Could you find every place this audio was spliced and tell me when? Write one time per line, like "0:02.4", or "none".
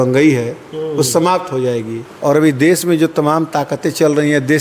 0:02.0